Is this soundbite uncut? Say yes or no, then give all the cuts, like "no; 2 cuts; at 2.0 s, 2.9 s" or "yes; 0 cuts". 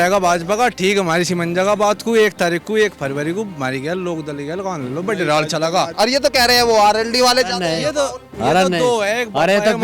no; 1 cut; at 5.9 s